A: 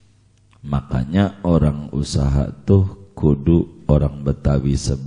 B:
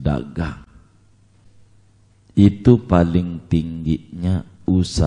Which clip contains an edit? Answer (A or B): B